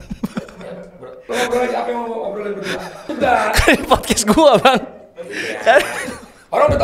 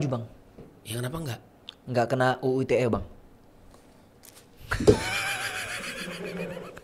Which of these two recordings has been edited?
first; 2 cuts; at 1.1 s, 3.1 s

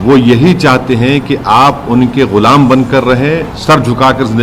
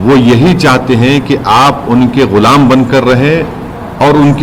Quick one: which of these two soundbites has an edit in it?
first; 1 cut; at 3.5 s

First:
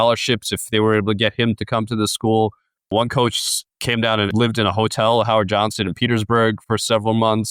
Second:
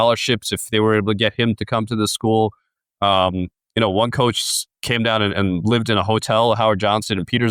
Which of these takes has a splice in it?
first; 3 cuts; at 2.9 s, 4.3 s, 6.6 s

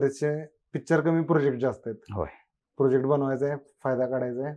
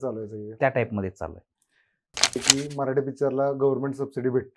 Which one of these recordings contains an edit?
second; 1 cut; at 2.4 s

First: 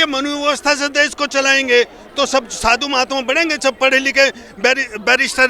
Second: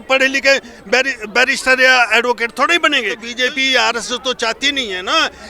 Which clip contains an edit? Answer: second; 1 cut; at 3.3 s

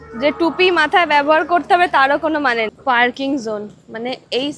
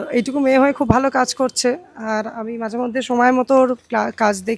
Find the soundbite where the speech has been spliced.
first; 1 cut; at 2.7 s

